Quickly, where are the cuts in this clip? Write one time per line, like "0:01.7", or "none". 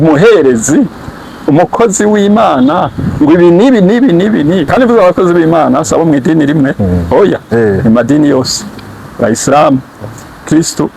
0:04.7